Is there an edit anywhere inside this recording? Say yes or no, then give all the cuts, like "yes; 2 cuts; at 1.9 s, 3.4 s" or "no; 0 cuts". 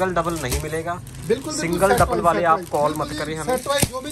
no; 0 cuts